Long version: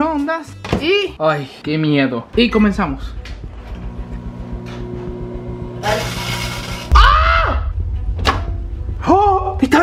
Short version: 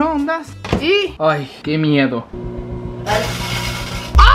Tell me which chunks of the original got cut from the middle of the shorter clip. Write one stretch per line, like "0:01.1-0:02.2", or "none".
0:02.3-0:05.0